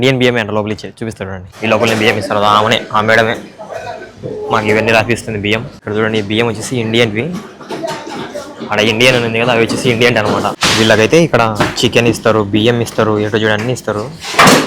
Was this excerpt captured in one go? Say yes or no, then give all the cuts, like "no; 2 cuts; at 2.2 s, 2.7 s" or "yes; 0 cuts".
no; 3 cuts; at 1.5 s, 5.7 s, 10.6 s